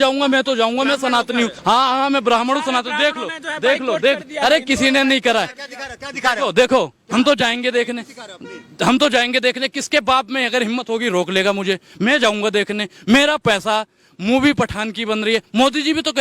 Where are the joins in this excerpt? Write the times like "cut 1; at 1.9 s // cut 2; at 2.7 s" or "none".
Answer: cut 1; at 1.6 s